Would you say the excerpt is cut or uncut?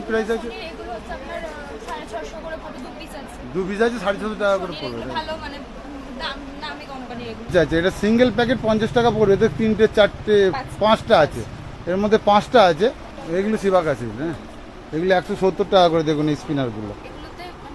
cut